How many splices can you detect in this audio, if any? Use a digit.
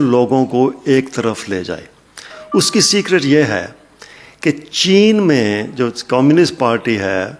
0